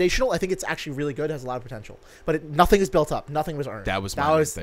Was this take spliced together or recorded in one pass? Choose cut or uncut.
uncut